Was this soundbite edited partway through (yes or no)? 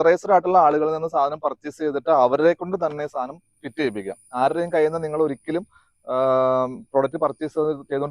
no